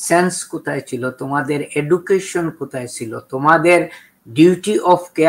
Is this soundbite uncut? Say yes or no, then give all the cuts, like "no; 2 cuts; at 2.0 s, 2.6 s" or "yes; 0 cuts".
yes; 0 cuts